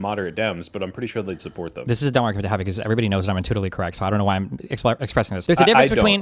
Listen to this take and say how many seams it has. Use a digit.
2